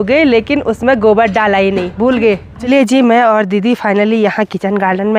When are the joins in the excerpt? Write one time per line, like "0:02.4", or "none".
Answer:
0:02.6